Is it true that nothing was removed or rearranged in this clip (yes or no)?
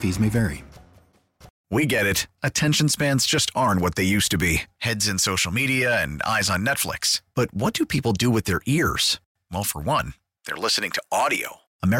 no